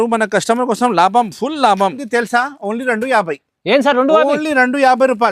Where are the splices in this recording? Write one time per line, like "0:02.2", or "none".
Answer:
0:02.0